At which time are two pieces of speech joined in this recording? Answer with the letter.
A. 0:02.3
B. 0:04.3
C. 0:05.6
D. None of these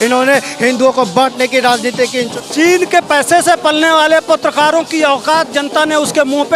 A